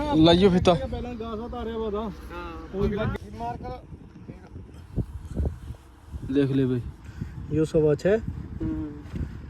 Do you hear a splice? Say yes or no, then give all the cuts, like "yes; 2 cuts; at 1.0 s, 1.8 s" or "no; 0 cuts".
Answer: no; 0 cuts